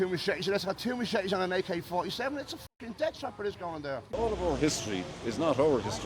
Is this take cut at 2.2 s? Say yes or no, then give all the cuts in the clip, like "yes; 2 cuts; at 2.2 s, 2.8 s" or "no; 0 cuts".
no; 1 cut; at 4.0 s